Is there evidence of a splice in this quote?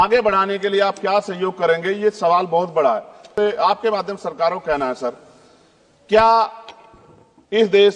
yes; 1 cut; at 3.3 s

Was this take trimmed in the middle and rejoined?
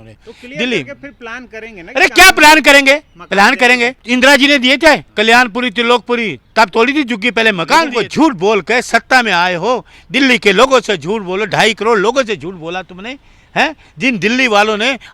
yes; 3 cuts; at 4.0 s, 5.1 s, 7.9 s

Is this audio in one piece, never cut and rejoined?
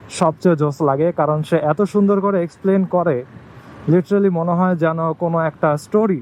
yes; 0 cuts

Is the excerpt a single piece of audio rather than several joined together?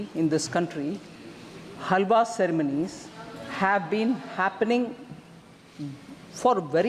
yes; 0 cuts

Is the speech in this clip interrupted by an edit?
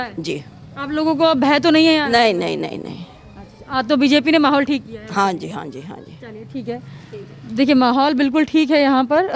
no; 0 cuts

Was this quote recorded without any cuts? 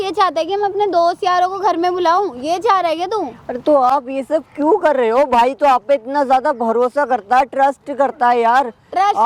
yes; 0 cuts

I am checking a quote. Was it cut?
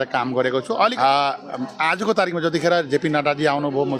yes; 1 cut; at 1.0 s

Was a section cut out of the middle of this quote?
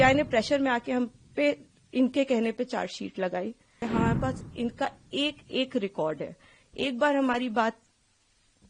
yes; 1 cut; at 3.8 s

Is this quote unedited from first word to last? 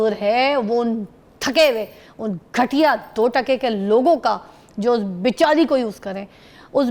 yes; 0 cuts

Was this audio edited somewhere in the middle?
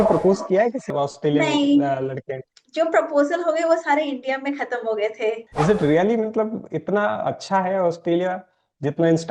yes; 2 cuts; at 0.9 s, 5.5 s

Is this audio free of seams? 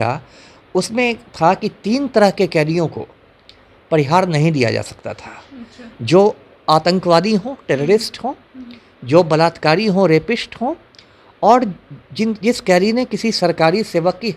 yes; 0 cuts

